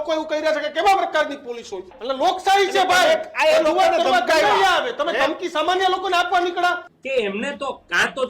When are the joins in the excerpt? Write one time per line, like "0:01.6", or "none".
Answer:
0:02.0
0:06.9